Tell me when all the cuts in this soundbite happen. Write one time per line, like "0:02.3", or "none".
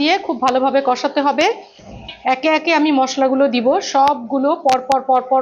none